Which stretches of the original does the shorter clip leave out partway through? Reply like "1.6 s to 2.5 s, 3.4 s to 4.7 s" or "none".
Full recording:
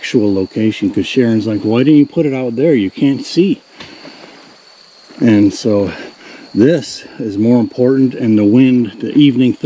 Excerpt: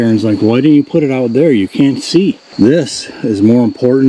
3.7 s to 6.4 s